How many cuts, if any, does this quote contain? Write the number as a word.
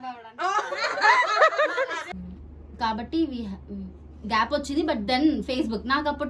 one